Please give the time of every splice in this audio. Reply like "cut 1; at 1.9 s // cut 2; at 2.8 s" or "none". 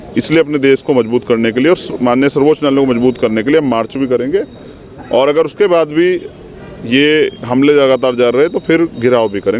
none